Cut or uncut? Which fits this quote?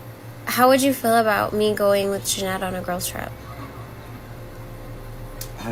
uncut